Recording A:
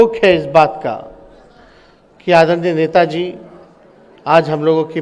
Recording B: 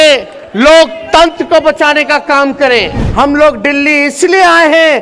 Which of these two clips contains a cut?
B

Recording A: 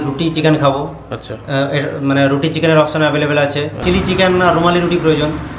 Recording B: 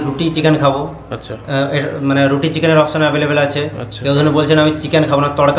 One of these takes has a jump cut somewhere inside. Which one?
A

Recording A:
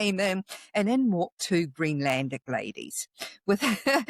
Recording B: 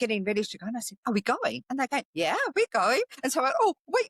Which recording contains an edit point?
B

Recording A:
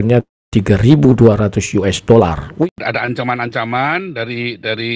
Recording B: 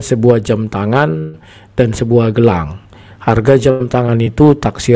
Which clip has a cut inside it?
A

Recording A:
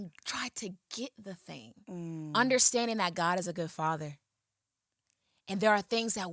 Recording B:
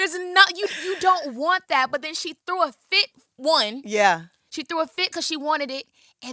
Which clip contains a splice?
A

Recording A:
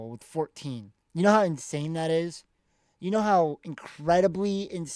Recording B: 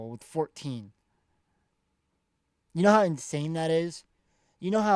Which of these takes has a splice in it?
A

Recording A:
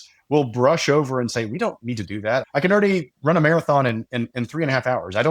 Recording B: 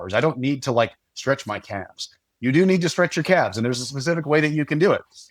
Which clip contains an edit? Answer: A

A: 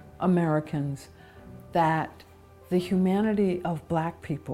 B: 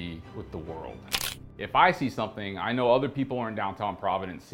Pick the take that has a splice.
B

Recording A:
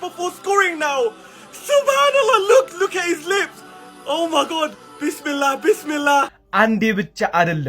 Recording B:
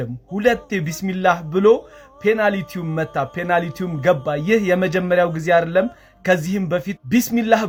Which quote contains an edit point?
A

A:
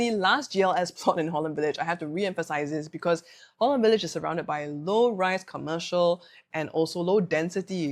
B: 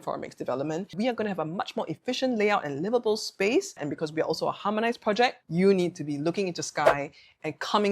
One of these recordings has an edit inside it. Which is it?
B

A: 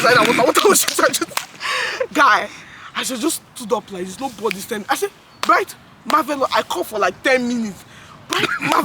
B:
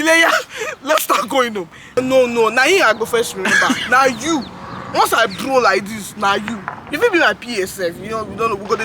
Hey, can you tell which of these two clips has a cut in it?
B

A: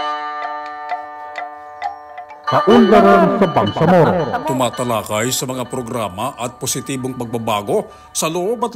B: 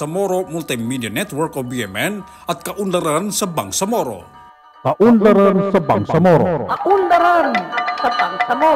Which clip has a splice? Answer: A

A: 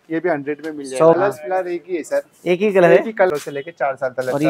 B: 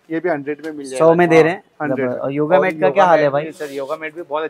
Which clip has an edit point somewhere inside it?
A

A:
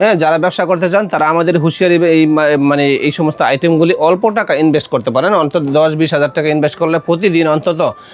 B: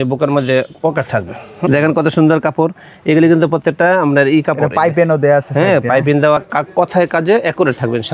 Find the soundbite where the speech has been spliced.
B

